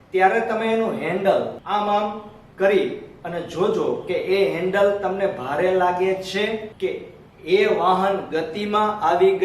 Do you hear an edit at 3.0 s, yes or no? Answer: no